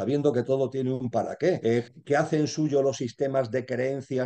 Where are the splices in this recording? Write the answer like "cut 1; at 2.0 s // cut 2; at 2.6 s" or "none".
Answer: cut 1; at 1.6 s